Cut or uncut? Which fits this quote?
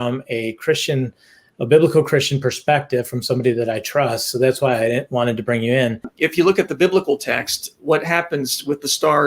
cut